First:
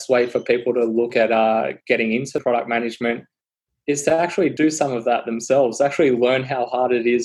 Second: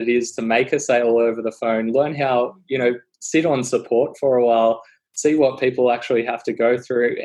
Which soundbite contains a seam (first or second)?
first